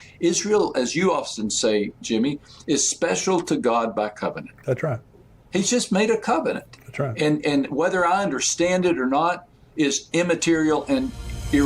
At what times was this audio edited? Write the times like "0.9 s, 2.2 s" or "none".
8.1 s